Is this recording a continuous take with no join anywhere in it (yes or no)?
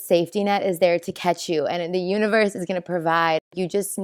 yes